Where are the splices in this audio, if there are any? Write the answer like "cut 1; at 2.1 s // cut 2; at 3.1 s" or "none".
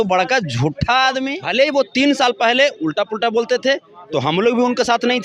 cut 1; at 1.3 s